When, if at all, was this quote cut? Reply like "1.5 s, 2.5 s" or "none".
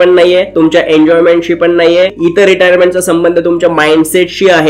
2.1 s